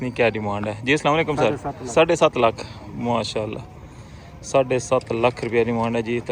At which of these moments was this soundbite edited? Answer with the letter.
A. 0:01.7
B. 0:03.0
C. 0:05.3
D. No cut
A